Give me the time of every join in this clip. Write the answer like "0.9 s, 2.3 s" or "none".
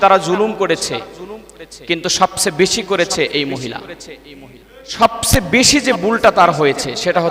4.9 s